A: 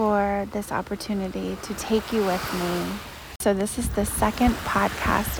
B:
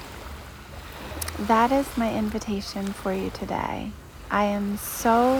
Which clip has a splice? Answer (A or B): A